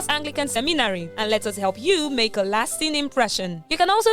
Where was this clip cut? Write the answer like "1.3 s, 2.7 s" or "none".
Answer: 1.1 s